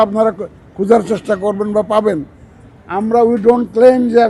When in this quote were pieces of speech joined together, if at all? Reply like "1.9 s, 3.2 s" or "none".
none